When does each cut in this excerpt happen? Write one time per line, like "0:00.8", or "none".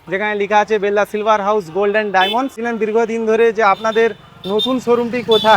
0:02.6